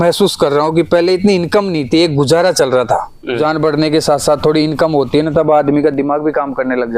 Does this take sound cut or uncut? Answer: cut